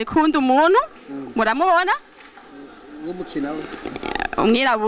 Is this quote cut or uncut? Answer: uncut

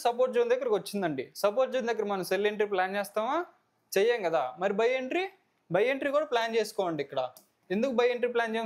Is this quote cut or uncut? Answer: uncut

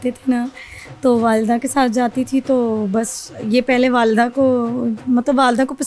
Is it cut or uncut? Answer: uncut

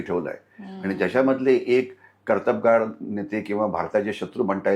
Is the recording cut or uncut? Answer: uncut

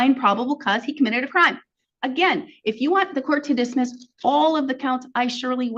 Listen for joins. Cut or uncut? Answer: uncut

